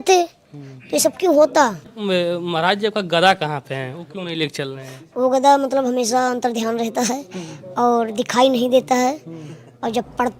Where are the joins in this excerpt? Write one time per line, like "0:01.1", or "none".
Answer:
0:01.9